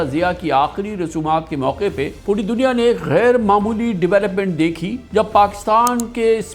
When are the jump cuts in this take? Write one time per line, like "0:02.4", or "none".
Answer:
none